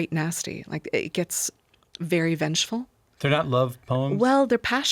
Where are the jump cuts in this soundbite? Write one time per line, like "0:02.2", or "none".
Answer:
none